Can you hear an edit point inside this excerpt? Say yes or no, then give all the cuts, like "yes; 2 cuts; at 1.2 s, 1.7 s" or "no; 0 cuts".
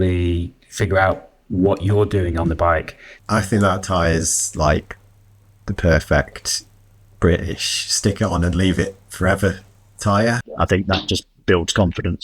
yes; 2 cuts; at 3.1 s, 10.5 s